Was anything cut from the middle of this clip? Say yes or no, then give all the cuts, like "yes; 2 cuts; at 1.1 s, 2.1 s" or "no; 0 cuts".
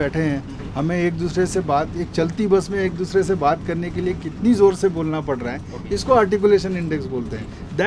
no; 0 cuts